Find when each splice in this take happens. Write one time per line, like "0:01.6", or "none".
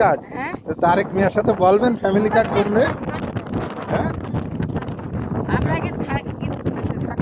none